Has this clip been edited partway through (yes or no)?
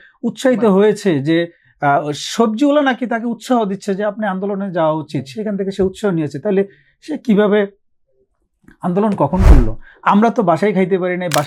no